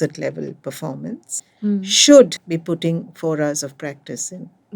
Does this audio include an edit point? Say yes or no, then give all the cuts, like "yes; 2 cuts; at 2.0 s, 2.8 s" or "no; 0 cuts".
yes; 2 cuts; at 1.3 s, 2.5 s